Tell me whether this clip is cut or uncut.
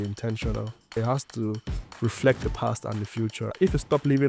cut